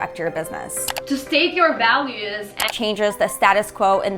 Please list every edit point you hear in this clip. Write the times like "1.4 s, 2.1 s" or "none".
0.9 s, 2.7 s